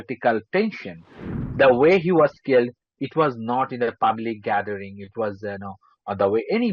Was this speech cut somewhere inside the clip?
yes; 1 cut; at 1.4 s

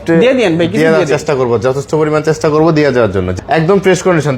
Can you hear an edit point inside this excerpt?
yes; 1 cut; at 3.3 s

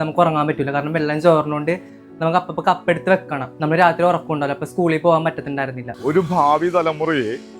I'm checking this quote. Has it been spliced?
yes; 2 cuts; at 3.5 s, 5.8 s

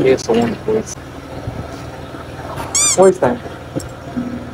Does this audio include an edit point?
yes; 1 cut; at 1.0 s

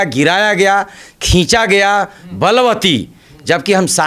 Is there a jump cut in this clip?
no; 0 cuts

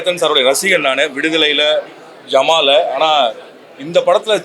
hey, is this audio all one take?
yes; 0 cuts

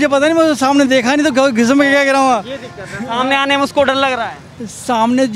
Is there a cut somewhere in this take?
no; 0 cuts

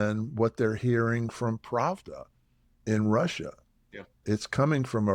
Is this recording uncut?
no; 1 cut; at 4.2 s

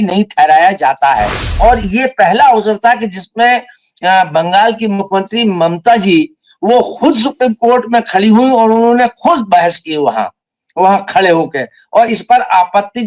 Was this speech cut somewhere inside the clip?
yes; 1 cut; at 1.4 s

